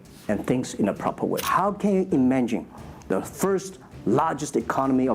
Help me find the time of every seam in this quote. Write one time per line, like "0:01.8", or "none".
0:01.4